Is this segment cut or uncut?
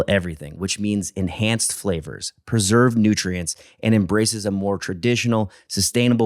uncut